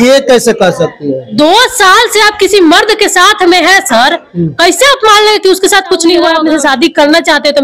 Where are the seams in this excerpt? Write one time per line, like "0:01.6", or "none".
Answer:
0:06.3